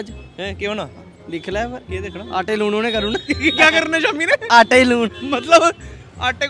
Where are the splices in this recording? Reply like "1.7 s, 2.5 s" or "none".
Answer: none